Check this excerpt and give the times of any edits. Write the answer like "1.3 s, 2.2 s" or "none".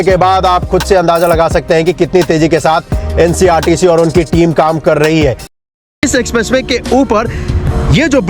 6.0 s